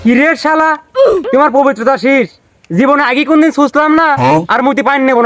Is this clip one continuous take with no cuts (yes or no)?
no